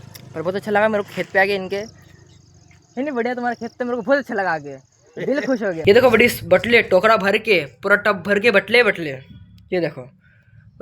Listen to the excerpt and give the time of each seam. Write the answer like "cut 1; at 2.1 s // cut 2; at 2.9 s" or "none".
cut 1; at 5.8 s